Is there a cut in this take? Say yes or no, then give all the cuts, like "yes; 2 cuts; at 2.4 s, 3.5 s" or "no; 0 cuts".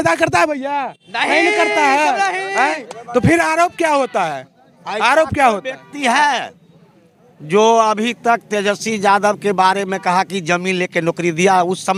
no; 0 cuts